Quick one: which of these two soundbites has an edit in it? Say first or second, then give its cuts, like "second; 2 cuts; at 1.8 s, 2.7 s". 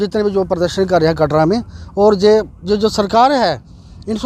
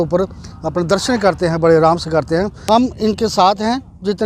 second; 1 cut; at 2.6 s